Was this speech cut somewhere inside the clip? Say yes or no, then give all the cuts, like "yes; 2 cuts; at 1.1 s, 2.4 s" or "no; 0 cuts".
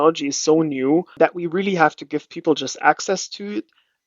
yes; 1 cut; at 1.1 s